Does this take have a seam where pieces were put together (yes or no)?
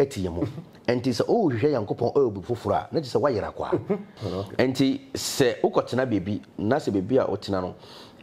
yes